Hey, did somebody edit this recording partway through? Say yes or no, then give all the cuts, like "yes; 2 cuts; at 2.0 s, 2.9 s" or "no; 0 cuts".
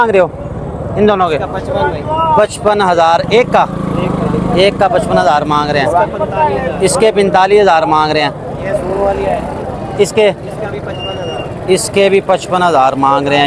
no; 0 cuts